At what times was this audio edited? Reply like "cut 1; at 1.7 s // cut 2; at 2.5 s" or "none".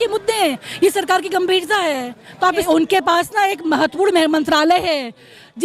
cut 1; at 2.6 s